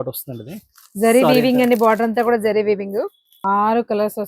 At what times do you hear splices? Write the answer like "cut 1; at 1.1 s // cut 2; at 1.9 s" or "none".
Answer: cut 1; at 3.2 s